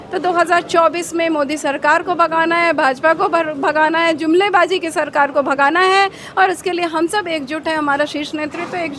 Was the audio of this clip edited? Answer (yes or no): no